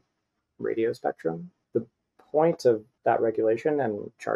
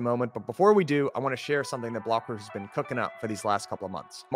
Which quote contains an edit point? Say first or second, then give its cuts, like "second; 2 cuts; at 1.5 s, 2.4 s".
first; 2 cuts; at 1.5 s, 2.9 s